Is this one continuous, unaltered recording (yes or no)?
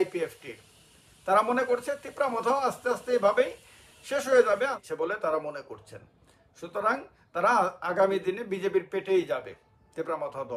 no